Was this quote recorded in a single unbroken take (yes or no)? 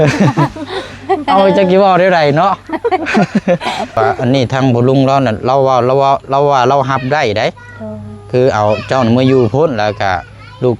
no